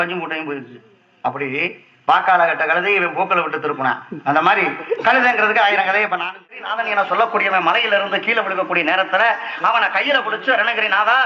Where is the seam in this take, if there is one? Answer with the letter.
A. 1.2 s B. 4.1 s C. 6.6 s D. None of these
C